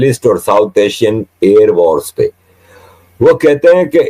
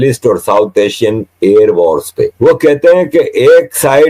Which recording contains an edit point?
second; 1 cut; at 2.3 s

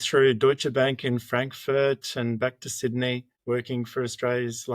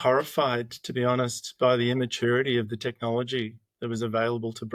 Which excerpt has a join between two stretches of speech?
first; 1 cut; at 3.3 s

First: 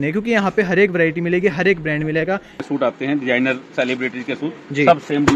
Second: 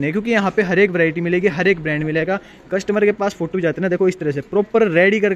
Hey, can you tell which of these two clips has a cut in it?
first; 1 cut; at 2.6 s

